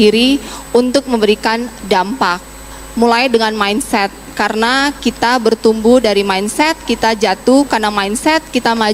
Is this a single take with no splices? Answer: yes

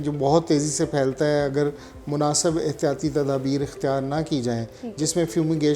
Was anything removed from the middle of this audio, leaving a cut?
no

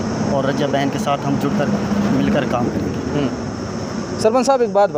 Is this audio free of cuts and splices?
yes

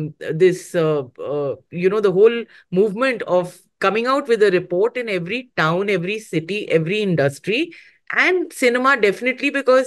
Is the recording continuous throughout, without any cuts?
yes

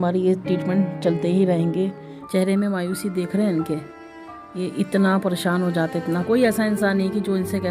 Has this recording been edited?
yes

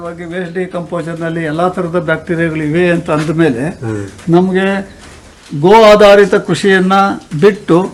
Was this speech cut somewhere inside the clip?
no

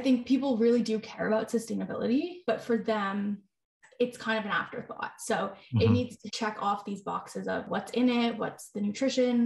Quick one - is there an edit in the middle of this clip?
yes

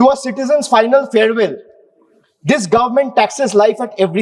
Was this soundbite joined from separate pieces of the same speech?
no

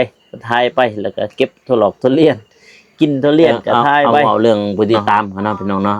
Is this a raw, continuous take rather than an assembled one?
no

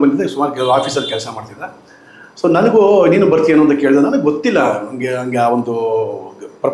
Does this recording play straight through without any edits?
yes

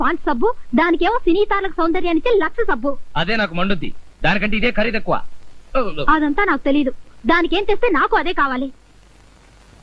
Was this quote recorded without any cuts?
yes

